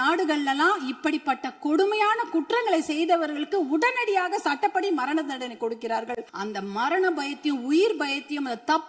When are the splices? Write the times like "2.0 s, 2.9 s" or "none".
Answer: 6.3 s